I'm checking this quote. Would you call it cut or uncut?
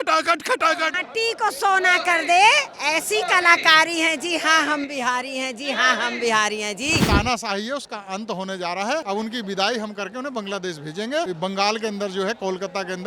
cut